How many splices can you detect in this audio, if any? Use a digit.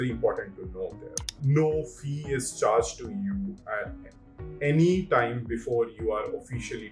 1